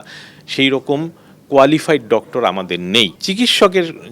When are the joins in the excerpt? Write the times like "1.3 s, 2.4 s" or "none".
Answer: 3.2 s